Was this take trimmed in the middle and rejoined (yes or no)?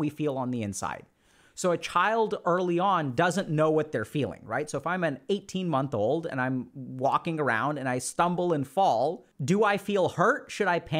no